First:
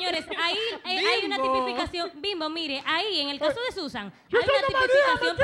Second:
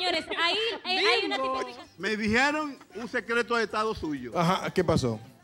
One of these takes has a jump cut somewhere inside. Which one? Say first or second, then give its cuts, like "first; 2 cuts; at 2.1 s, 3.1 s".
second; 1 cut; at 1.7 s